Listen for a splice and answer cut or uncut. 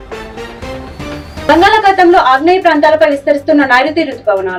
uncut